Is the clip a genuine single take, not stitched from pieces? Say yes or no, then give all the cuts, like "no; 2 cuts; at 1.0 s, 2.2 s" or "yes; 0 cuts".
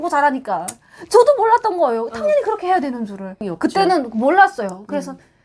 no; 1 cut; at 3.4 s